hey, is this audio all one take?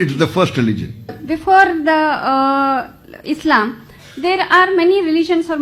no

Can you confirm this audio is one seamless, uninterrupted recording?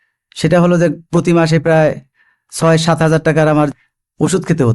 no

